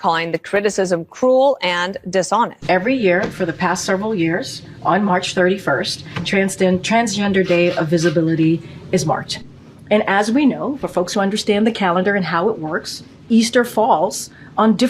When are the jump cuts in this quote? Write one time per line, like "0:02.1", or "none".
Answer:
0:02.6